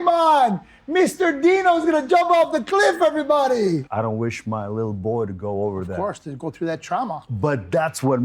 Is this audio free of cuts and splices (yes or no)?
no